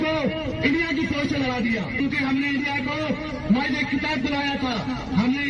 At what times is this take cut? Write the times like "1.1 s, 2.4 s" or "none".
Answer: 2.0 s